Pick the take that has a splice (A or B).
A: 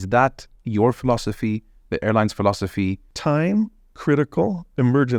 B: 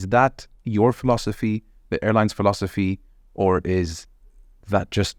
A